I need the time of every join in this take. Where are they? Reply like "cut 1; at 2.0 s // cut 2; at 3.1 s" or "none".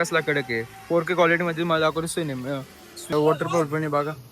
cut 1; at 3.1 s